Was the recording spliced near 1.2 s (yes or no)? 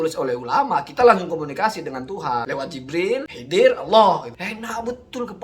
no